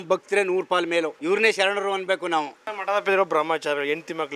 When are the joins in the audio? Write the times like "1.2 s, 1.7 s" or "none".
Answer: 1.1 s, 2.7 s